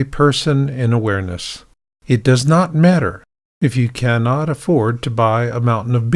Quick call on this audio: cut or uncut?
uncut